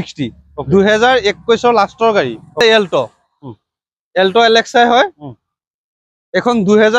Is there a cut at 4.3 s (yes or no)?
no